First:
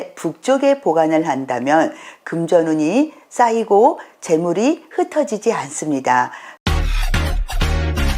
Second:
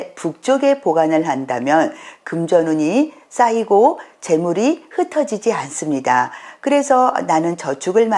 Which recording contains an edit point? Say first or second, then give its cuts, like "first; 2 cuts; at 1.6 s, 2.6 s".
first; 1 cut; at 6.4 s